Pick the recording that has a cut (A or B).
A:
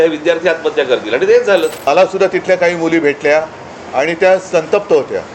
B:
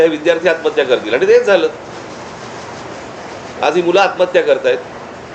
A